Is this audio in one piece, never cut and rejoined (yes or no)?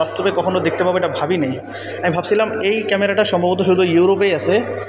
yes